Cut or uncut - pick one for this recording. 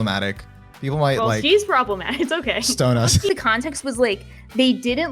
cut